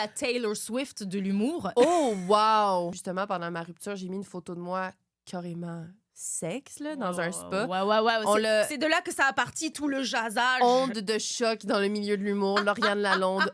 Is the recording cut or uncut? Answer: cut